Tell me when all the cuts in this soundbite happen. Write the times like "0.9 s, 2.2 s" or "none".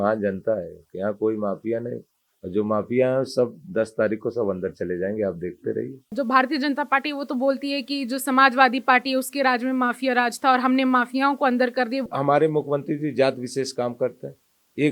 6.1 s, 12.1 s